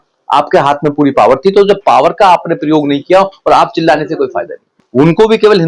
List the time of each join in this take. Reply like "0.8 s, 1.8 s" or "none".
4.7 s